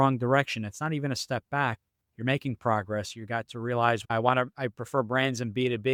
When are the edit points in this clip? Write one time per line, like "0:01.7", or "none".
none